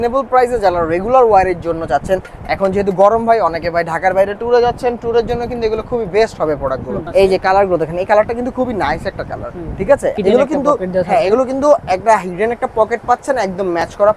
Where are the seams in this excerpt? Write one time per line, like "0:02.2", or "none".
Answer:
0:07.0
0:10.2